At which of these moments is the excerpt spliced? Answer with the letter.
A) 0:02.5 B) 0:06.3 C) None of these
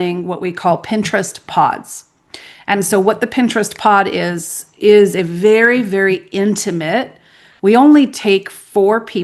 C